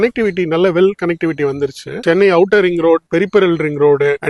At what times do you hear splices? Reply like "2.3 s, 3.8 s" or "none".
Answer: 2.0 s